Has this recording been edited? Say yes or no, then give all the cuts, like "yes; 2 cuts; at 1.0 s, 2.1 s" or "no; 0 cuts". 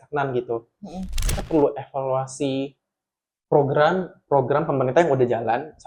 yes; 1 cut; at 1.1 s